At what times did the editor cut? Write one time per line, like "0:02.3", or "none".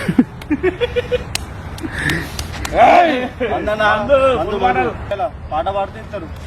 0:00.9
0:03.3
0:05.1